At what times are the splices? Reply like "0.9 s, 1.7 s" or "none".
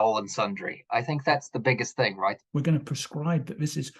2.4 s